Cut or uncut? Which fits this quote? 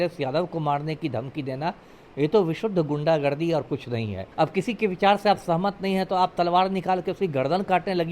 cut